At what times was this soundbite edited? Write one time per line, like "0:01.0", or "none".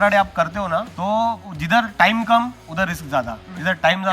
0:00.9
0:01.5
0:03.0